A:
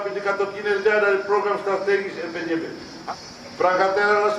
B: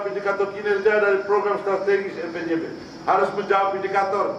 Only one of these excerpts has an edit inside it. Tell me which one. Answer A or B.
A